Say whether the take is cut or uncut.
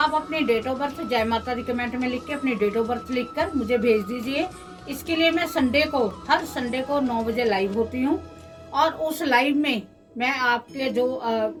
uncut